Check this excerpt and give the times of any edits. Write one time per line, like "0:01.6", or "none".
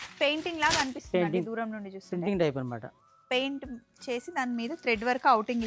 none